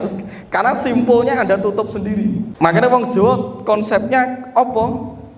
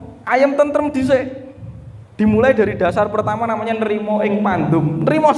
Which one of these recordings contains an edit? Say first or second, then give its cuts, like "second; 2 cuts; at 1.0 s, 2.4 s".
first; 1 cut; at 2.5 s